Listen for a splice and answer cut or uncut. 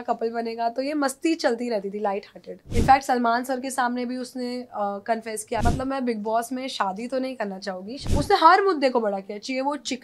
cut